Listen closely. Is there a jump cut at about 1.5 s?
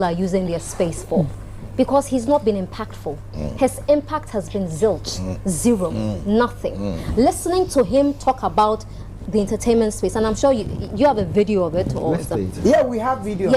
no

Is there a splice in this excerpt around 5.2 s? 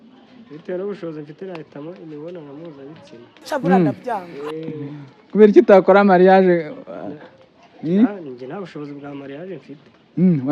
no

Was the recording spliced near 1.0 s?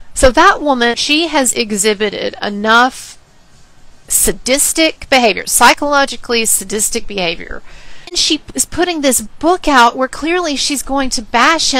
yes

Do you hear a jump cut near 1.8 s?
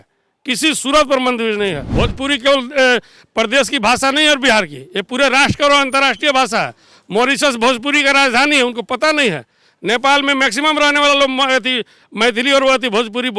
yes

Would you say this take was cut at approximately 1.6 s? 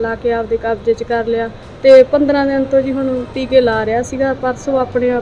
yes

